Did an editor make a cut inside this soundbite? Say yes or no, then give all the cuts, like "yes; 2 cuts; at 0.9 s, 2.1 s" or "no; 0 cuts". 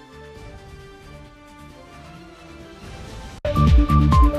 no; 0 cuts